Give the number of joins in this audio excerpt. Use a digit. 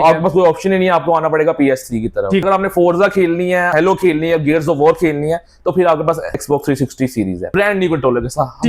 4